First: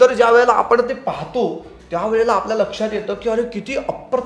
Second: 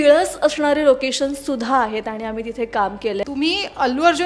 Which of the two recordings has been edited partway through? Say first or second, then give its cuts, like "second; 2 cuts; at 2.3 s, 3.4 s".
second; 1 cut; at 3.2 s